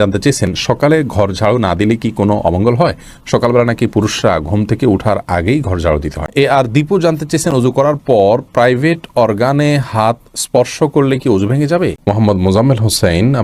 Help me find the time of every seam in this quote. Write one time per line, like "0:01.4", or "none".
0:06.3
0:12.0